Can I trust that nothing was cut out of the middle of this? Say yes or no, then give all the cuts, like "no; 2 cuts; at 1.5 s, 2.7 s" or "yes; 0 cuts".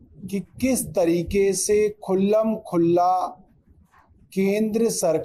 yes; 0 cuts